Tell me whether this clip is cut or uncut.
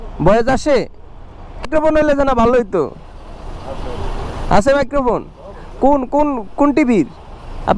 cut